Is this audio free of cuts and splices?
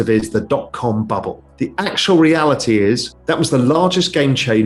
no; 2 cuts; at 1.5 s, 3.1 s

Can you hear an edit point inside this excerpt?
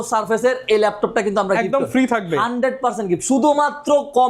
no; 0 cuts

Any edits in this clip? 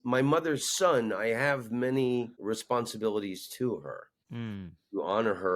yes; 2 cuts; at 2.3 s, 4.6 s

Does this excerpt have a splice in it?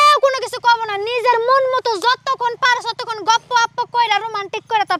no; 0 cuts

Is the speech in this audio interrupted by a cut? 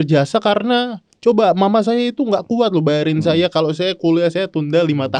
no; 0 cuts

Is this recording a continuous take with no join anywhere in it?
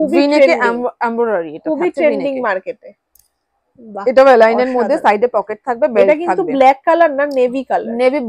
yes; 0 cuts

